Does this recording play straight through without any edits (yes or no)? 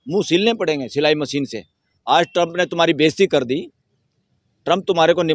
no